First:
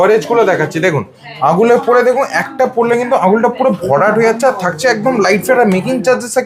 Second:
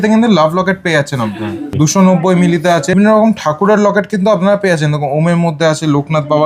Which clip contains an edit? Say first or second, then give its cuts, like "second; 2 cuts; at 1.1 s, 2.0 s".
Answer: second; 2 cuts; at 1.7 s, 2.9 s